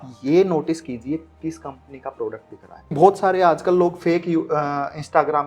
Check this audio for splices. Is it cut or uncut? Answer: cut